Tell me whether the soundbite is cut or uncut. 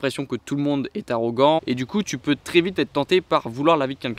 cut